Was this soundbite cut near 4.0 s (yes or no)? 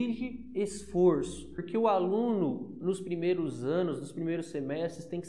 no